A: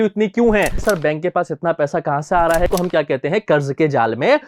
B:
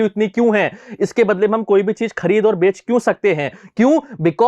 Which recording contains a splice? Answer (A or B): A